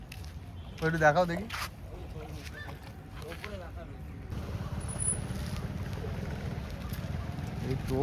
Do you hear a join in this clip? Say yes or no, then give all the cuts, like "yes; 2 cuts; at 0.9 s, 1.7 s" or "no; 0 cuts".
yes; 1 cut; at 4.3 s